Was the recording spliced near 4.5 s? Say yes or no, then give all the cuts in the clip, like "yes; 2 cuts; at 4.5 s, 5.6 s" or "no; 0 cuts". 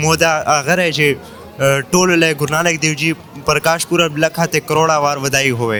no; 0 cuts